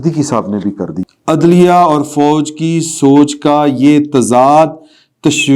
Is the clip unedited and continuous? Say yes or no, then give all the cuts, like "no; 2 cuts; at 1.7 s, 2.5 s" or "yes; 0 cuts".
no; 1 cut; at 0.9 s